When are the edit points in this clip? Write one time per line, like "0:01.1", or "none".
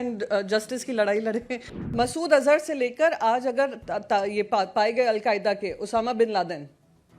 0:01.9